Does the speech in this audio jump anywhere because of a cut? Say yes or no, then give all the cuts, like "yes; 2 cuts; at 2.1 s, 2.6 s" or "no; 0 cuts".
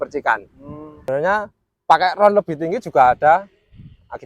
yes; 1 cut; at 1.1 s